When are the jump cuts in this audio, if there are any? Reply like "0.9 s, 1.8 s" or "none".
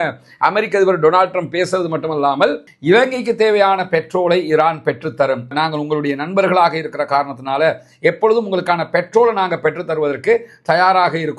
2.7 s

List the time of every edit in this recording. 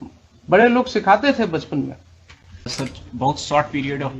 2.7 s

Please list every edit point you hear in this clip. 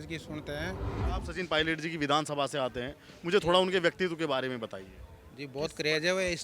1.0 s

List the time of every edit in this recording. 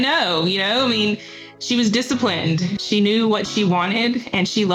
2.8 s

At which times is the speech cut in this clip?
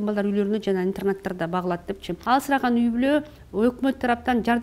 2.1 s

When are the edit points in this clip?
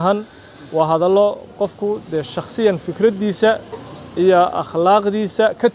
none

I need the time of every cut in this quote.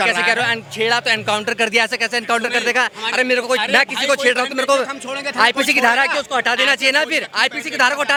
none

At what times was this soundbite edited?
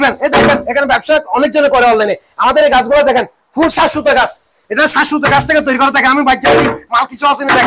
none

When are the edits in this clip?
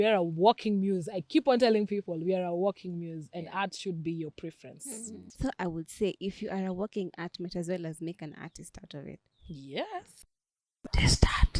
5.2 s, 10.3 s

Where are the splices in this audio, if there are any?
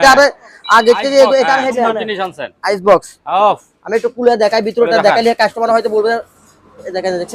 1.8 s

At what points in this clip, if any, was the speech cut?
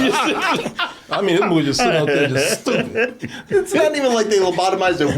3.2 s

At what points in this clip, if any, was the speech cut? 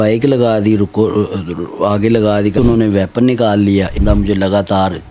2.5 s, 3.9 s

